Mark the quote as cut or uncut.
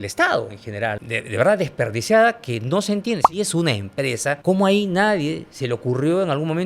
cut